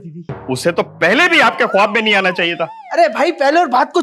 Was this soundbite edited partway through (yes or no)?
no